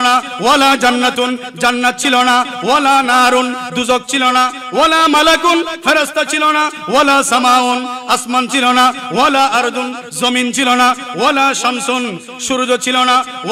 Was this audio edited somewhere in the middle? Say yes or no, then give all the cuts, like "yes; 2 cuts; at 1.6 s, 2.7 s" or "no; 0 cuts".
no; 0 cuts